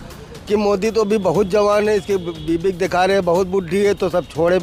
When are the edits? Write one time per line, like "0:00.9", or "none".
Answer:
none